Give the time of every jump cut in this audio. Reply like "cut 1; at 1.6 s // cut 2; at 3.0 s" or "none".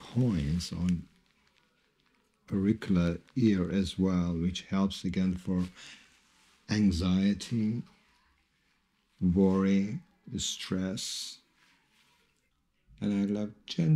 cut 1; at 12.5 s